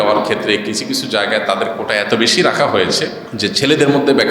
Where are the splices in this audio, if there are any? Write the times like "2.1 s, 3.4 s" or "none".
3.2 s